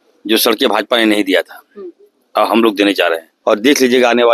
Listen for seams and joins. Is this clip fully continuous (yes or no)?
no